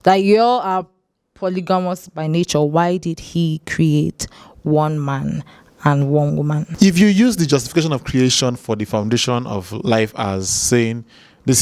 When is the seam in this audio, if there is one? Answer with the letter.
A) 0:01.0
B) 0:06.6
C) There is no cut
B